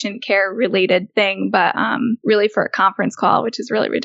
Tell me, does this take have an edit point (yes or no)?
yes